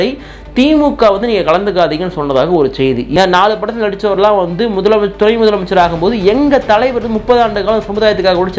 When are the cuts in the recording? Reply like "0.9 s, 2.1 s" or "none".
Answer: 3.1 s